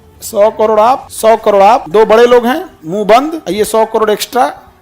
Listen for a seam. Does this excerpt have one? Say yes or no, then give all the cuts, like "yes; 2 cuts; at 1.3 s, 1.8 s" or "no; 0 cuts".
yes; 3 cuts; at 1.1 s, 1.8 s, 3.4 s